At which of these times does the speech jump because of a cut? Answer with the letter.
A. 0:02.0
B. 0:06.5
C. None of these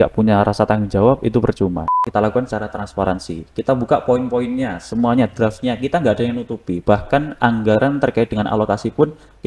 A